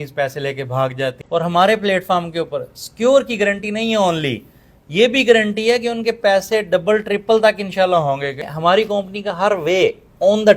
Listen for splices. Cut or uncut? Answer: cut